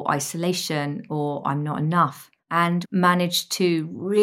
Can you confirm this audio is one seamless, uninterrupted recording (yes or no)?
no